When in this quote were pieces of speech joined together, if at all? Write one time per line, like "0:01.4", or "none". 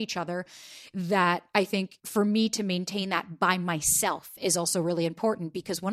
0:02.0